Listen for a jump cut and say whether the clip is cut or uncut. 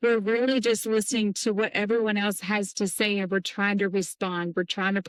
uncut